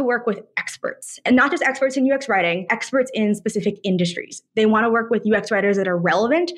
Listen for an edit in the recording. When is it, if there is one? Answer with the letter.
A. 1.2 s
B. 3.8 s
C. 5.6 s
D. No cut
A